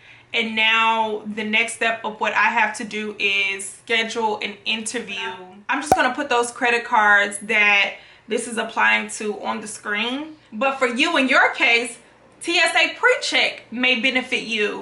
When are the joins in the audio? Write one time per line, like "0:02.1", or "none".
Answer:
0:05.5
0:10.4